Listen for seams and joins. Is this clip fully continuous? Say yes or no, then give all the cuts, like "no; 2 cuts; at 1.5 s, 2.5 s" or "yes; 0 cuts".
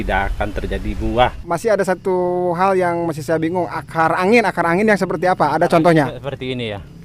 no; 1 cut; at 1.4 s